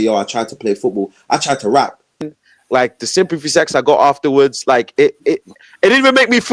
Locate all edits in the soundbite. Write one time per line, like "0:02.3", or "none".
0:02.2

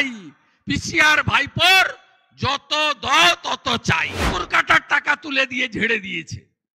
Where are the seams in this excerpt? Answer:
0:04.3

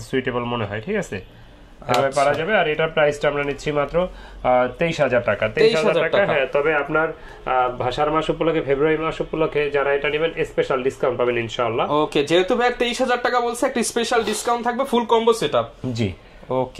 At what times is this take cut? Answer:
none

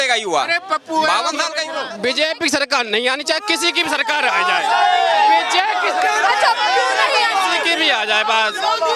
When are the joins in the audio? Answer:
0:01.8

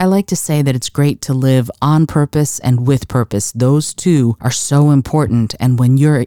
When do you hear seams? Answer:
none

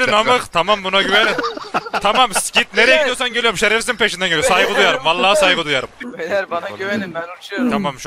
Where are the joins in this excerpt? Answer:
0:06.0

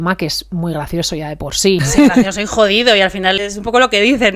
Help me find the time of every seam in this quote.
0:01.9
0:03.4

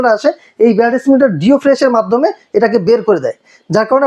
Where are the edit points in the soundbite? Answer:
none

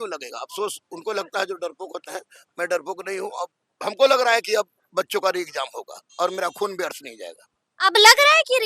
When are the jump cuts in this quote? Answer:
0:03.6

